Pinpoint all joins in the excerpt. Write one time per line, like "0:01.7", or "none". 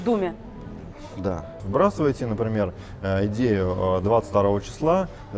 0:01.6